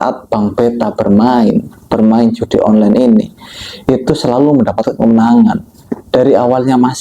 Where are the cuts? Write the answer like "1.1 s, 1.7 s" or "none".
none